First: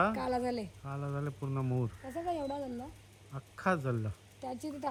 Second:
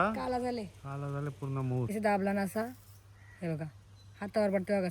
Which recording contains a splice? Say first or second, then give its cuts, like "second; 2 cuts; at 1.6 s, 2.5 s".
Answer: second; 1 cut; at 1.9 s